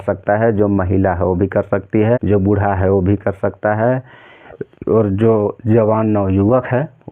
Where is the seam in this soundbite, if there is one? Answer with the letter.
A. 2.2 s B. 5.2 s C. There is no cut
A